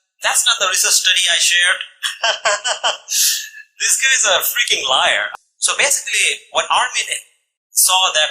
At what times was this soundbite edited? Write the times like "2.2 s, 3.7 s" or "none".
5.3 s